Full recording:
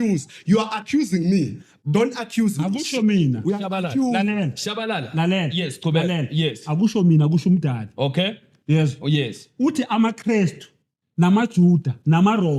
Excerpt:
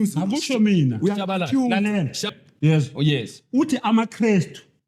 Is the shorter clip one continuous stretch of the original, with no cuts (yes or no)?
no